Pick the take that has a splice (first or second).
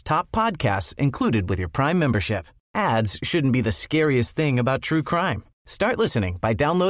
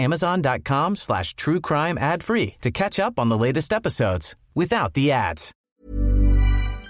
second